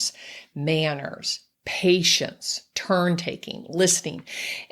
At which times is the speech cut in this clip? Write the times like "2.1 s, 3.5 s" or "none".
none